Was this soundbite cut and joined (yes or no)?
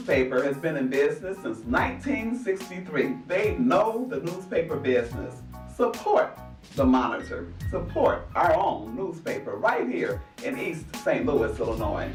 no